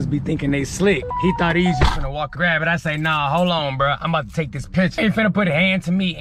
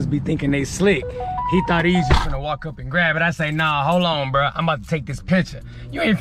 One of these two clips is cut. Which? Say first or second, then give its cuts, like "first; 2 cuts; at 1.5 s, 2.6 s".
first; 3 cuts; at 1.1 s, 2.3 s, 4.9 s